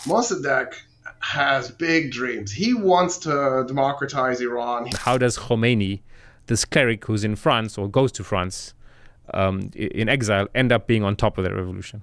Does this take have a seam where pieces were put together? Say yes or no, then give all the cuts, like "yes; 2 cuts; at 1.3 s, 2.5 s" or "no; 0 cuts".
yes; 1 cut; at 4.9 s